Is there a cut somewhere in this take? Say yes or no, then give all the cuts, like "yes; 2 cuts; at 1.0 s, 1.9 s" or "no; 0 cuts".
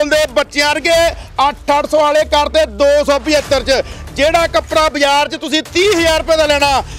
no; 0 cuts